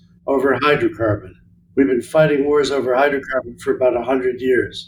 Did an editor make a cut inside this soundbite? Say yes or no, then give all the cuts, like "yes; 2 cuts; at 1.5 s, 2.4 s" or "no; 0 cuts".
no; 0 cuts